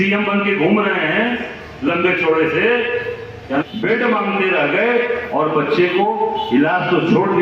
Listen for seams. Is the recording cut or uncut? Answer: cut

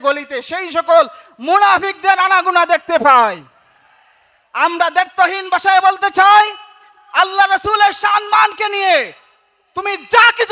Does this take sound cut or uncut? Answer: uncut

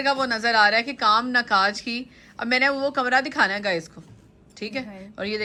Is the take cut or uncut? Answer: uncut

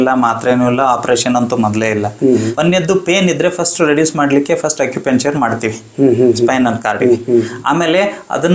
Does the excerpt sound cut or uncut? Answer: cut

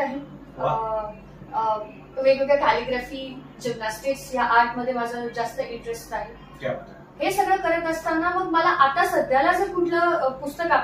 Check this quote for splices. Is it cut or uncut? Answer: uncut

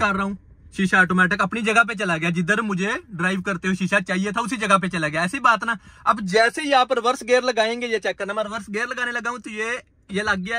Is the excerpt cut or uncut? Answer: uncut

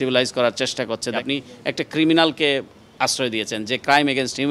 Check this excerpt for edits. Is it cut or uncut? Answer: cut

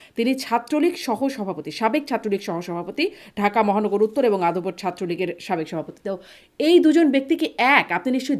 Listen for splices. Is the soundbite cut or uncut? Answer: uncut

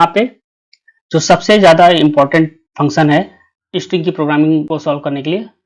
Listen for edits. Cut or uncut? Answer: uncut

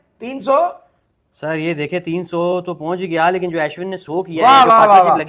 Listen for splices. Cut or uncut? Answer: uncut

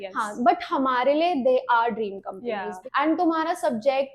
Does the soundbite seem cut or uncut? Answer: cut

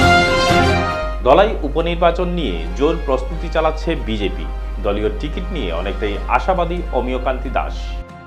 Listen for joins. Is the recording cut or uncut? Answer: uncut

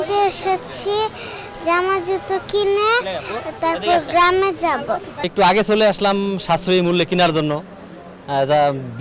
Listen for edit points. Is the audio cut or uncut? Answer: uncut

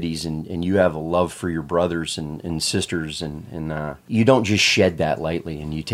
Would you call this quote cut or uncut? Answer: cut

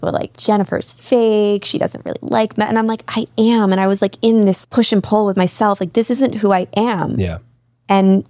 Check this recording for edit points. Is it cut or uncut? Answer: cut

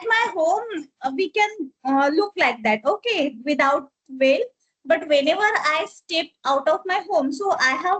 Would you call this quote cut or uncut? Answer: uncut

